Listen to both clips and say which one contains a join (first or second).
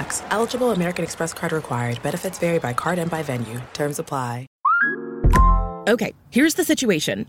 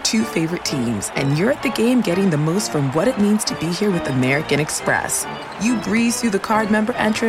first